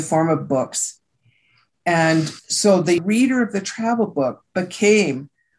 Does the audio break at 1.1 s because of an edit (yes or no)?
no